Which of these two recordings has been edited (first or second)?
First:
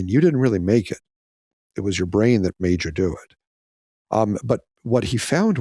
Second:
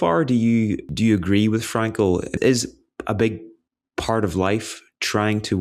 second